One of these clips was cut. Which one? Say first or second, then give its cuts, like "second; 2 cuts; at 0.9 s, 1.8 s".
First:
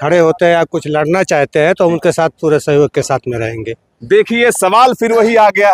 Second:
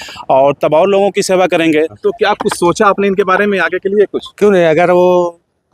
second; 1 cut; at 1.9 s